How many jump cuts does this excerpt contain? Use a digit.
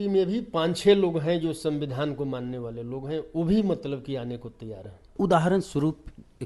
1